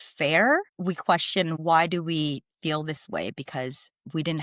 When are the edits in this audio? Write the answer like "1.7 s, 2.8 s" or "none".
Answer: 0.9 s